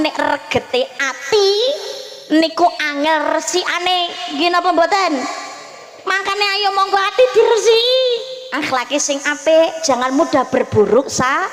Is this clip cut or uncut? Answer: uncut